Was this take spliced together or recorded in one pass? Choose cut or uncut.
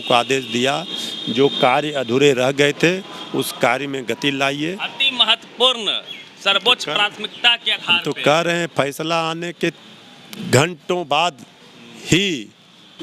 uncut